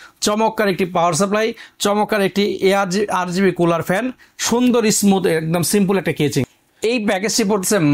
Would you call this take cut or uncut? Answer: cut